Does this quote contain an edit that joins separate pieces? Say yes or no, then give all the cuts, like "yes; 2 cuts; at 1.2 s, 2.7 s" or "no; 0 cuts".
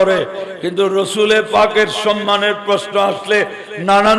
no; 0 cuts